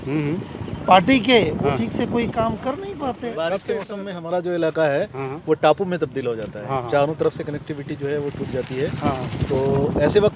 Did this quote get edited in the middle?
yes; 1 cut; at 3.5 s

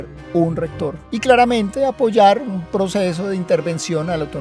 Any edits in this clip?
yes; 1 cut; at 1.0 s

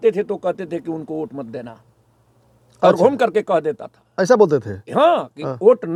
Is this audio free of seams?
yes; 0 cuts

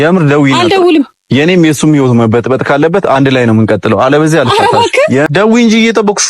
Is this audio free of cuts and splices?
no; 1 cut; at 5.3 s

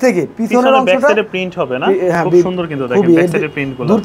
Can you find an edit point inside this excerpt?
no; 0 cuts

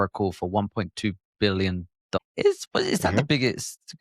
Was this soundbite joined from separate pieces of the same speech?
yes; 1 cut; at 2.2 s

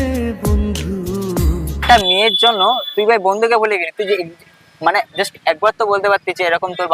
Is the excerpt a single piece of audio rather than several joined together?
yes; 0 cuts

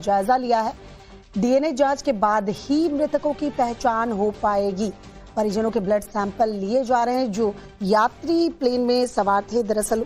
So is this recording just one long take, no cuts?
no; 1 cut; at 4.4 s

